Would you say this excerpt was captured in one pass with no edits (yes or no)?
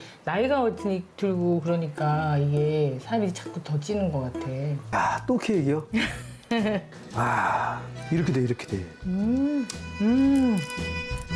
no